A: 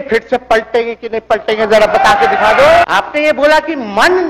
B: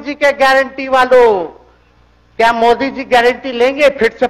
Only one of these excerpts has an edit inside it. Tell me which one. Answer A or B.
A